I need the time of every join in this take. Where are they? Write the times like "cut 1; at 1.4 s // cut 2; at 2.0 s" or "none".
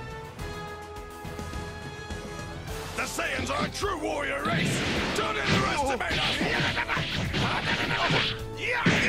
cut 1; at 2.9 s